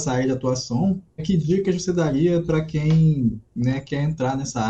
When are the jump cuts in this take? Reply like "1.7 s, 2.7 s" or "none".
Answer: 1.2 s

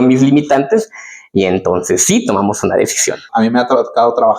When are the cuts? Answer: 3.2 s

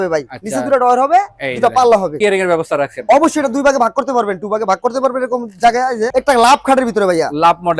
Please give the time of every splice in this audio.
2.1 s, 6.1 s

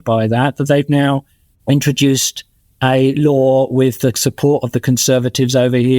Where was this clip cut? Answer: none

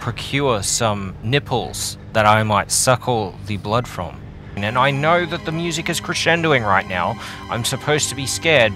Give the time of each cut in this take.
4.6 s

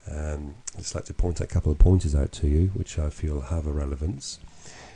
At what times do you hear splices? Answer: 1.2 s

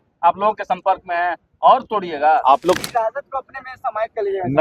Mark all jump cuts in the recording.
2.8 s

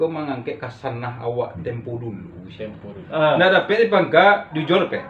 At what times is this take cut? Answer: 2.9 s

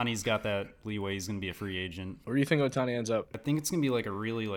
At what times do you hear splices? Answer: 2.2 s, 3.3 s

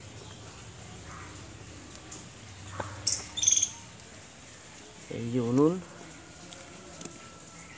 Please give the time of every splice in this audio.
none

